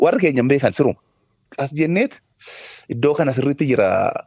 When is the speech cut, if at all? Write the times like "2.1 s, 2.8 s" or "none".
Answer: 1.5 s